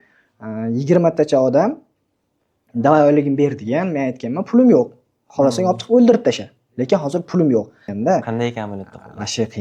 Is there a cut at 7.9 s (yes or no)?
yes